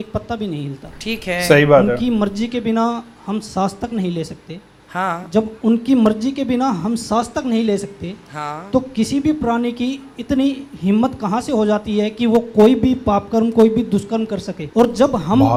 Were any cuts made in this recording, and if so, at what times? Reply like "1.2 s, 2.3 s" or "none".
none